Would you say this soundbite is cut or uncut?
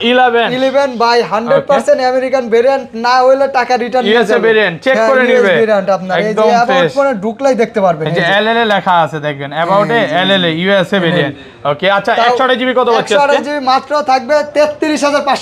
uncut